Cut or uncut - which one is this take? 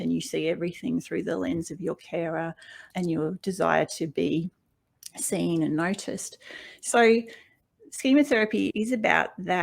cut